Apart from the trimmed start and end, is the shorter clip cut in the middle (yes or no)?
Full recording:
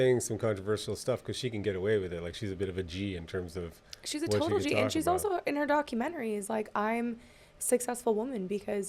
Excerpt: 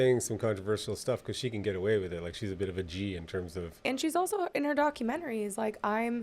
yes